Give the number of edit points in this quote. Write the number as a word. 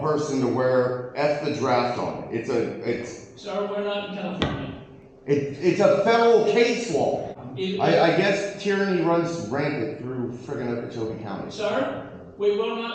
one